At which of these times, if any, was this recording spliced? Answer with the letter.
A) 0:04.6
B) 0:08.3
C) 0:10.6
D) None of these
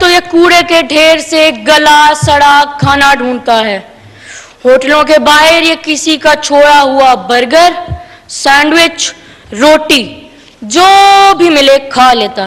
D